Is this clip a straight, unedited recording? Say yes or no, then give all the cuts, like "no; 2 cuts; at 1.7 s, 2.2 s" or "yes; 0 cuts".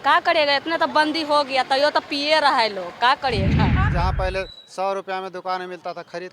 no; 1 cut; at 3.7 s